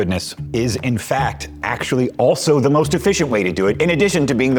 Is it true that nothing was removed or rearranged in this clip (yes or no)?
yes